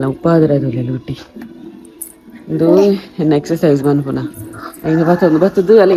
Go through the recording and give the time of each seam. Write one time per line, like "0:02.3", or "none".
none